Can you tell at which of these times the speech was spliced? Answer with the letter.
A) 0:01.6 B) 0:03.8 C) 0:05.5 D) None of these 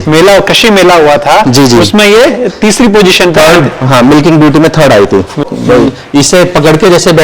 C